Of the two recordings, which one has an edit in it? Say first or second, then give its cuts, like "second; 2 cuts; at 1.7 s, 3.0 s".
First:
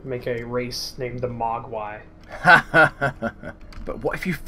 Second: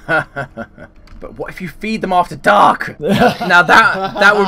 second; 1 cut; at 2.9 s